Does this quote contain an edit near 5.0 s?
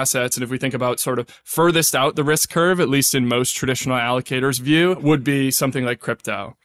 yes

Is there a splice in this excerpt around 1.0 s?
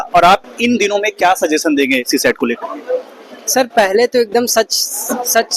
no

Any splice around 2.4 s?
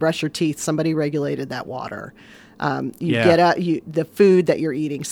no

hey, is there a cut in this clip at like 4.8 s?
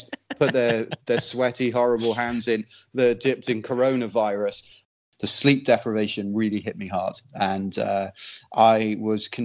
yes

